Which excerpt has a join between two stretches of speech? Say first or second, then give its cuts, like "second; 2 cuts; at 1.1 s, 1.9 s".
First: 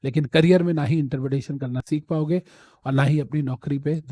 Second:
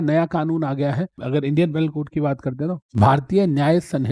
second; 1 cut; at 1.2 s